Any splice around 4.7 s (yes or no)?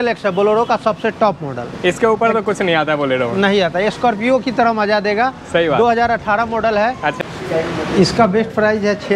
no